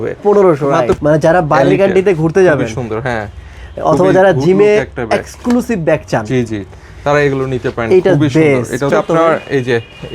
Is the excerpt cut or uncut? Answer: cut